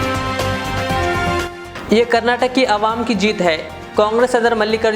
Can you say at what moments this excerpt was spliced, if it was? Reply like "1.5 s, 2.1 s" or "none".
1.4 s